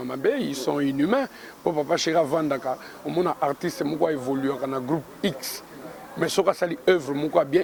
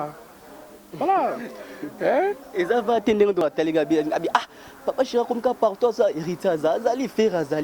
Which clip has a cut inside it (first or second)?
second